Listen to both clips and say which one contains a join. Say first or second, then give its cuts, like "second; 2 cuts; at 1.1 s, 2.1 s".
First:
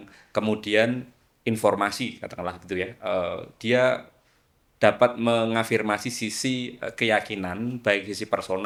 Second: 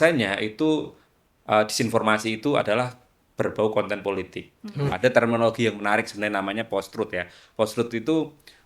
second; 1 cut; at 4.9 s